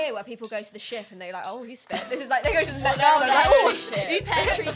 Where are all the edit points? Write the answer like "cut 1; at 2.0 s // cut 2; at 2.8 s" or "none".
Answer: none